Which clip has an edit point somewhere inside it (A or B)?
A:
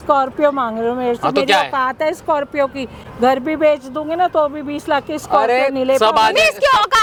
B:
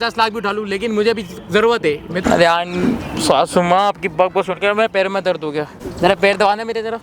B